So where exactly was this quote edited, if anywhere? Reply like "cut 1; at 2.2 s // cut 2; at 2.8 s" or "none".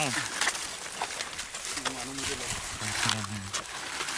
cut 1; at 2.8 s